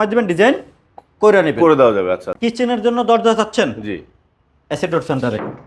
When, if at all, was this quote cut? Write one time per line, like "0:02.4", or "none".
0:02.3